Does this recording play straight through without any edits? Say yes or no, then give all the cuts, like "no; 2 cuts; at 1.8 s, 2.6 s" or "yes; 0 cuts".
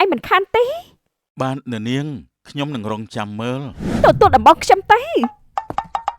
no; 1 cut; at 3.8 s